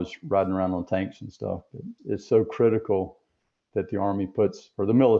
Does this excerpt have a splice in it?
yes; 1 cut; at 1.9 s

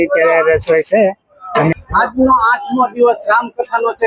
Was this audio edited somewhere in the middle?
yes; 1 cut; at 1.7 s

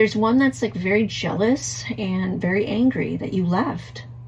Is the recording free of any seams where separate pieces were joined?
yes; 0 cuts

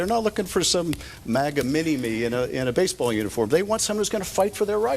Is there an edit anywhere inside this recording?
no; 0 cuts

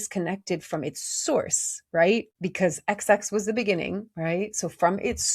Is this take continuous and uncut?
no; 1 cut; at 2.4 s

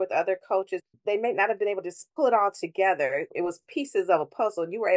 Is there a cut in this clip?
yes; 3 cuts; at 0.9 s, 2.0 s, 3.3 s

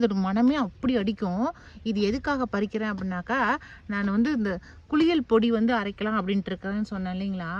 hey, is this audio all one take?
yes; 0 cuts

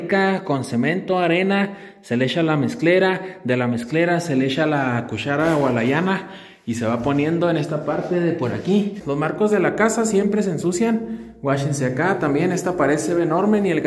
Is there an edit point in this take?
yes; 1 cut; at 9.0 s

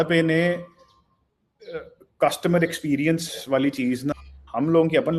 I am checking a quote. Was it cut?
yes; 1 cut; at 4.1 s

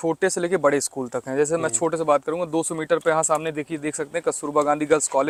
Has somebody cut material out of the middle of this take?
no; 0 cuts

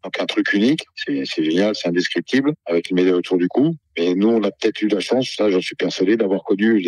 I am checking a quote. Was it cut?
yes; 2 cuts; at 1.0 s, 3.8 s

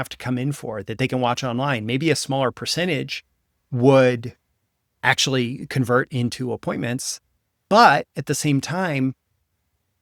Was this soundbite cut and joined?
no; 0 cuts

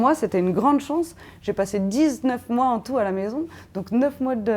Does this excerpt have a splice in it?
no; 0 cuts

